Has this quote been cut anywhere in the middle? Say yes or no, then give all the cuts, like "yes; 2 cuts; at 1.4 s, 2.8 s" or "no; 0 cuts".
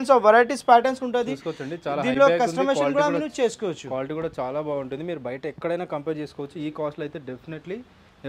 no; 0 cuts